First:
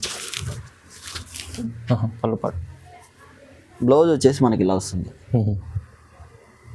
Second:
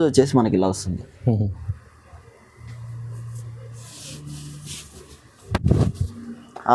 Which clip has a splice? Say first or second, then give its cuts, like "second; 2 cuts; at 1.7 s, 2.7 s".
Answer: first; 1 cut; at 1.6 s